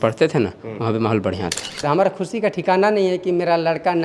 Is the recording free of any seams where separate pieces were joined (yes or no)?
no